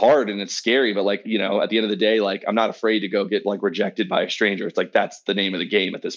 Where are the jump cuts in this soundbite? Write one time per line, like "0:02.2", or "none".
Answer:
0:01.2
0:05.2